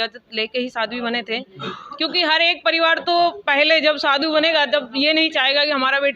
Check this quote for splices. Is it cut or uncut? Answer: uncut